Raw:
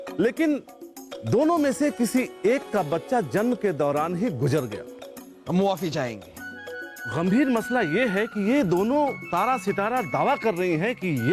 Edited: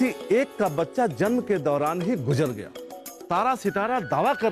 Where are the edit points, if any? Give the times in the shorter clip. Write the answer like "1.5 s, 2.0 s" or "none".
3.2 s